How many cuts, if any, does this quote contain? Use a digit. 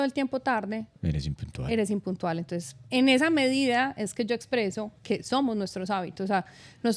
0